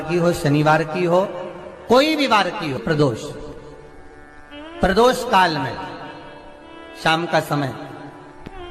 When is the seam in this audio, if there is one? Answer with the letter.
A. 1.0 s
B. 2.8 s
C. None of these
B